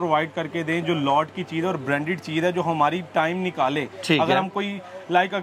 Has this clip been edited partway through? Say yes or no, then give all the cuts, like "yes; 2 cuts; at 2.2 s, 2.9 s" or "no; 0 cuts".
no; 0 cuts